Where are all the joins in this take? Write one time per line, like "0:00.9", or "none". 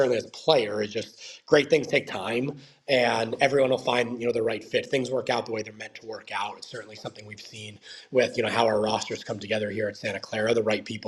none